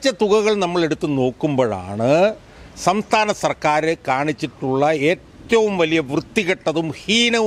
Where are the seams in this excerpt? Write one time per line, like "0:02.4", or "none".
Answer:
none